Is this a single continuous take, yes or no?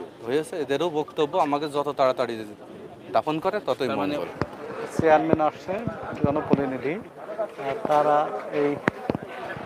no